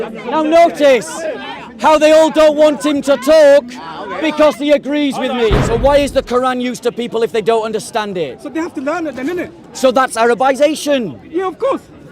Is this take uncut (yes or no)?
no